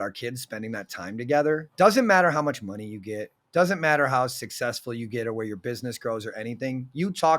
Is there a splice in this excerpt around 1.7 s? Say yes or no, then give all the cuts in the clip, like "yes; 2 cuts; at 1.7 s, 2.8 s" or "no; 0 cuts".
yes; 1 cut; at 1.7 s